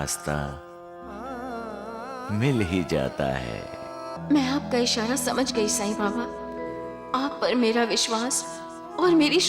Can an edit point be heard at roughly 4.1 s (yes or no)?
yes